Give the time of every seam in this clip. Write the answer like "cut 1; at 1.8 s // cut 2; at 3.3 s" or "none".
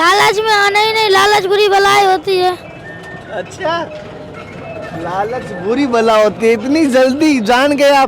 none